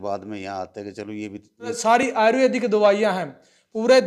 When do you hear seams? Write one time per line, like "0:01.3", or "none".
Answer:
0:01.8